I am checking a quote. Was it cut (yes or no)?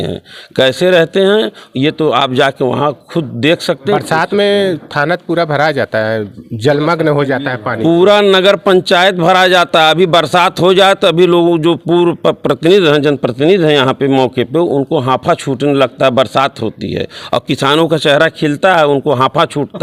no